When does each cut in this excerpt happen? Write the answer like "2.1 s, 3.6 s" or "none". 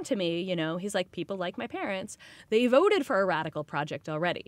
1.1 s